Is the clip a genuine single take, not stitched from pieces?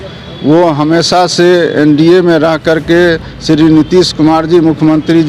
yes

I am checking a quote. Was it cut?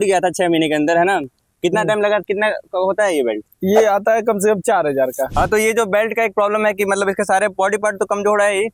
no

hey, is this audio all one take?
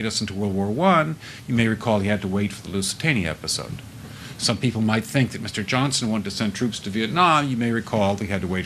no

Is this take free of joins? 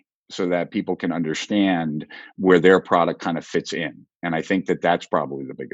yes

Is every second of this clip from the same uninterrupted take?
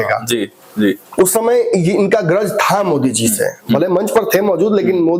yes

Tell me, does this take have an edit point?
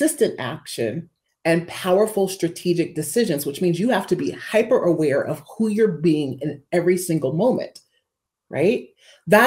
no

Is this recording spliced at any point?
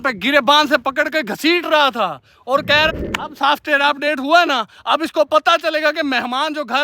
yes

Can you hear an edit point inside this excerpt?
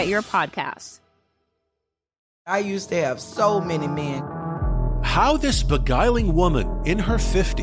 yes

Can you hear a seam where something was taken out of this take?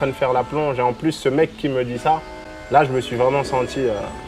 no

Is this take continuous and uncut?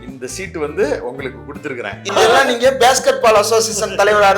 no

